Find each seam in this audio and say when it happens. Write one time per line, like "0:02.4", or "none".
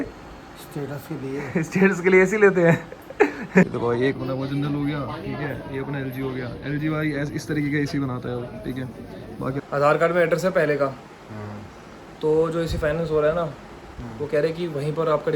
0:03.6
0:09.6